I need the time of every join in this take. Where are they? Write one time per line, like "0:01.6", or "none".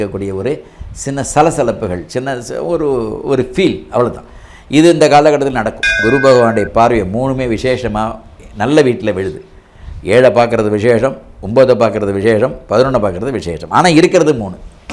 0:06.0